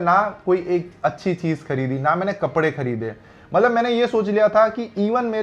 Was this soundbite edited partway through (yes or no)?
no